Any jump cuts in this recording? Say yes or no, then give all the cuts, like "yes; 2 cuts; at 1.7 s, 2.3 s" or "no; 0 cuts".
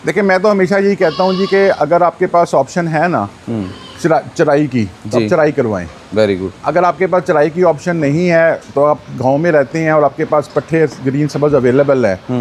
no; 0 cuts